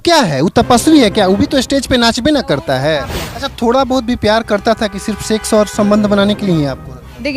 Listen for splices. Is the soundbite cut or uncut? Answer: cut